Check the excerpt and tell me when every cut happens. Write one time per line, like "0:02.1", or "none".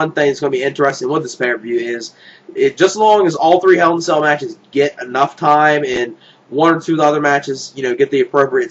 0:07.2